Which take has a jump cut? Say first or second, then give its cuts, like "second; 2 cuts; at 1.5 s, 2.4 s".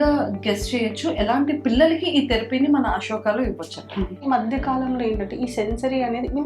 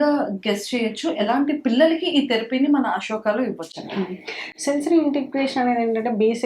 first; 1 cut; at 4.2 s